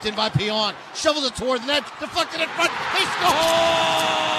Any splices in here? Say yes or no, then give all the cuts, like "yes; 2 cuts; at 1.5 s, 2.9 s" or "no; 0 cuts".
no; 0 cuts